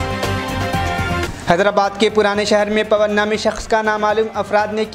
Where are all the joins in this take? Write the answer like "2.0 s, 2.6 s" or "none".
none